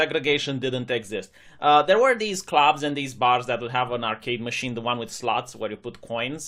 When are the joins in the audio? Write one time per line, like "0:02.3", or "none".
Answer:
none